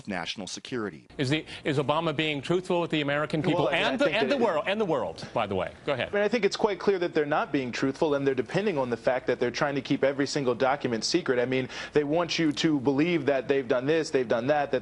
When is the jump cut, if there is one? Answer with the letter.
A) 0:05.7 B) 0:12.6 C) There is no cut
B